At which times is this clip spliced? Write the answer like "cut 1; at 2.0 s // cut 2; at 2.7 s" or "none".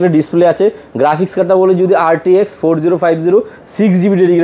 none